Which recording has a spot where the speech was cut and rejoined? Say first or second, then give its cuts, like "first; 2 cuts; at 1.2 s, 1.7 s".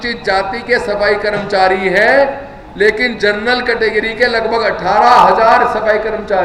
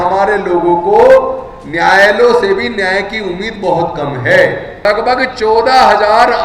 second; 1 cut; at 4.8 s